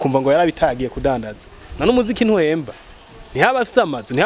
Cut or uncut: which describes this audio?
uncut